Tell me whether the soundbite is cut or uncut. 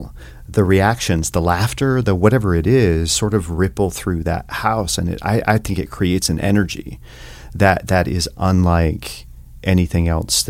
uncut